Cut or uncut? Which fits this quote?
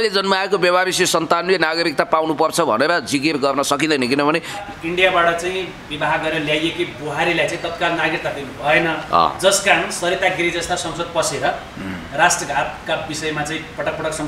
cut